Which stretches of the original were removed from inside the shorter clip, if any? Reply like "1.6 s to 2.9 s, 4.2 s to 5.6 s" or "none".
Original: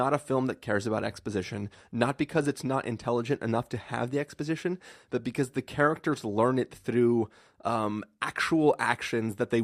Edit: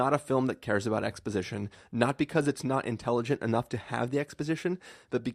none